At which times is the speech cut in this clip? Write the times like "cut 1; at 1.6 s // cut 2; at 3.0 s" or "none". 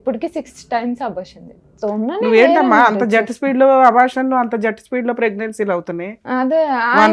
cut 1; at 1.7 s